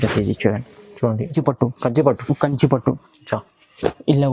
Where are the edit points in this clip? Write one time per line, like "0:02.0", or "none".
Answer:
0:01.3

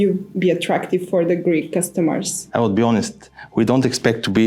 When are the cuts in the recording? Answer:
0:02.4

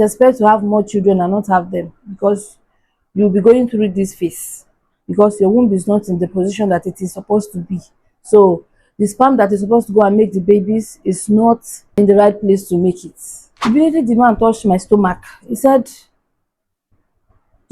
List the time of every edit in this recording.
0:11.8
0:13.6

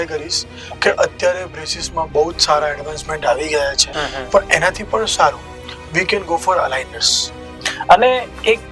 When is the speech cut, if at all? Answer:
0:03.9
0:07.5

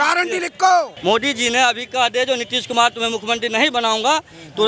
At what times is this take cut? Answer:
0:00.9

